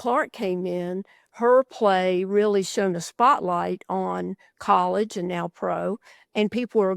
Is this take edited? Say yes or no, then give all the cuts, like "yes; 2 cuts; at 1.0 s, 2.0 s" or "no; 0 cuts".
no; 0 cuts